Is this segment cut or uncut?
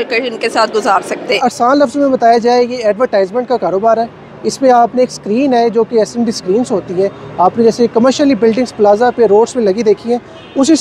cut